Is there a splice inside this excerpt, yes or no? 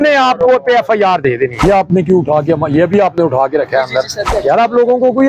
yes